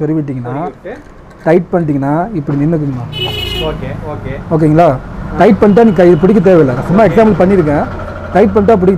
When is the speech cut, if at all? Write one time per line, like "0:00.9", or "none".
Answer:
none